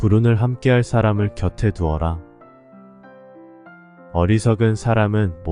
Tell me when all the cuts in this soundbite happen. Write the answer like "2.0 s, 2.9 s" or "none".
2.6 s, 4.1 s

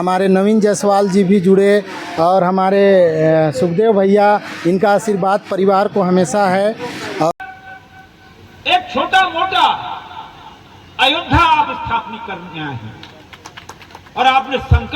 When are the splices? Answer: 7.3 s

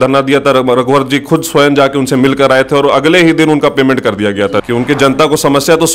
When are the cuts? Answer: 4.6 s

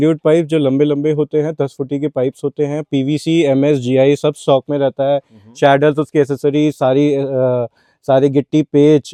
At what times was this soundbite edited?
none

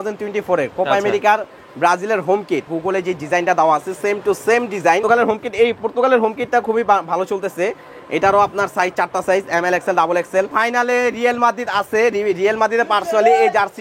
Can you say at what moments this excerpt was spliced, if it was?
2.7 s, 5.0 s, 10.5 s

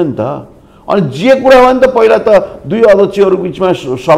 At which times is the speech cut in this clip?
none

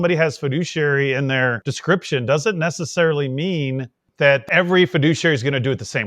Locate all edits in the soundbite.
1.7 s, 4.5 s

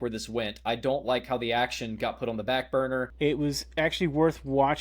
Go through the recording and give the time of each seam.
3.1 s

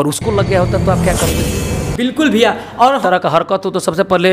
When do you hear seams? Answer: 3.0 s

